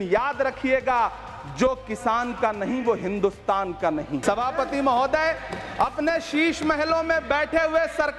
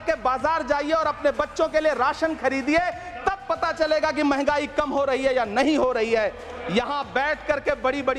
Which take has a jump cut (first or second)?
first